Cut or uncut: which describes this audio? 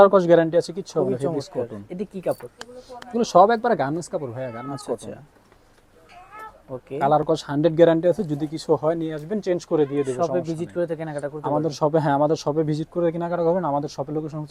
uncut